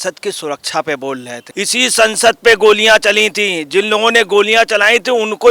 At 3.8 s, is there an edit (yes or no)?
no